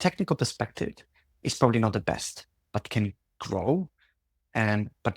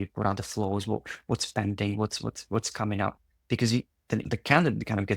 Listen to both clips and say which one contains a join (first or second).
second